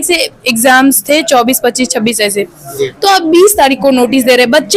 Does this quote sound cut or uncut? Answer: uncut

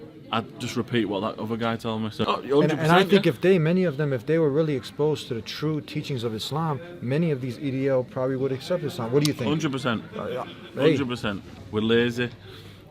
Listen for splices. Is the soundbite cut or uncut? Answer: cut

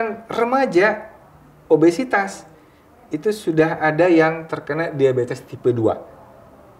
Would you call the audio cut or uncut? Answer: uncut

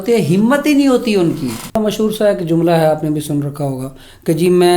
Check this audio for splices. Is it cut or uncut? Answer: cut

